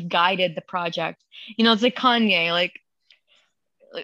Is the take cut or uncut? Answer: uncut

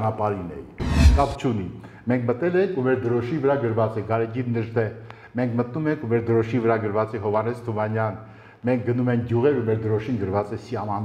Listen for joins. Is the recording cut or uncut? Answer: cut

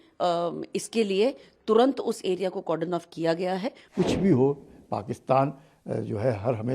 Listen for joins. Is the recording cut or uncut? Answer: cut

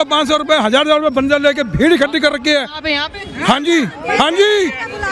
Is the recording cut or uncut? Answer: uncut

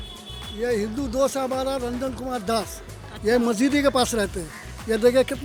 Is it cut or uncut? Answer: uncut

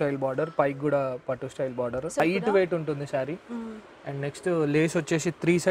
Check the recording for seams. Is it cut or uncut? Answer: cut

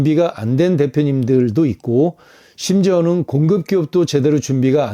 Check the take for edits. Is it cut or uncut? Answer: uncut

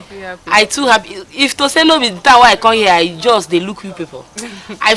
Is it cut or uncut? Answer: uncut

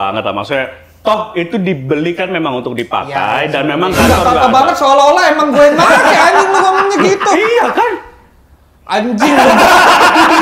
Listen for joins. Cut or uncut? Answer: uncut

